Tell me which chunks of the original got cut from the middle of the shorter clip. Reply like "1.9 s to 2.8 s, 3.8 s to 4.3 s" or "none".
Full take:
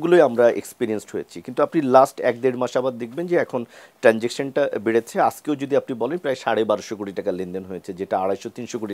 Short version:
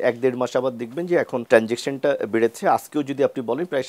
3.6 s to 3.9 s